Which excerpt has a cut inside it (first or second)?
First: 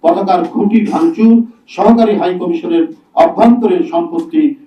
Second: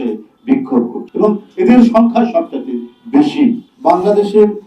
second